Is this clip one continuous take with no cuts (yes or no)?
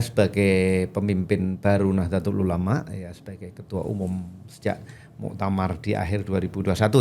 yes